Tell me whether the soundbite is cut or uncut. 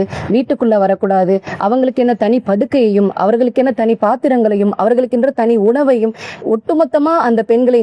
uncut